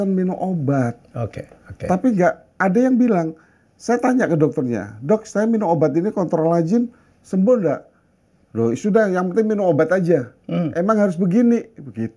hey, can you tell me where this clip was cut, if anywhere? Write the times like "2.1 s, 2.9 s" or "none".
none